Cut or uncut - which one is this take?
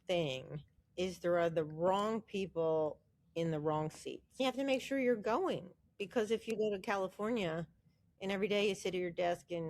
cut